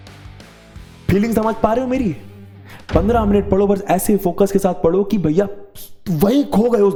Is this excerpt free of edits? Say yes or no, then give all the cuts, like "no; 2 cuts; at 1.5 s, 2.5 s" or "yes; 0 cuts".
yes; 0 cuts